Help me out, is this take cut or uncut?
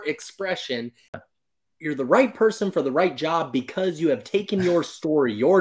cut